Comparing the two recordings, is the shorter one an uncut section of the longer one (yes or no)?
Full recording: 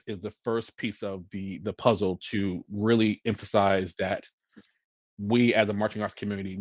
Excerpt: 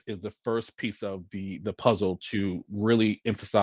yes